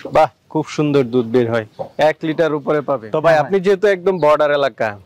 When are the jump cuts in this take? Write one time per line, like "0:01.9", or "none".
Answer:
0:03.1